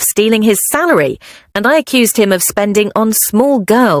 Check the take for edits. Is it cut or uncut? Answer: uncut